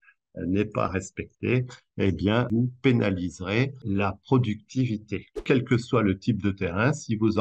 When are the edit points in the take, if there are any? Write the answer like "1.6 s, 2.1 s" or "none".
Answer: 2.5 s, 3.8 s, 5.4 s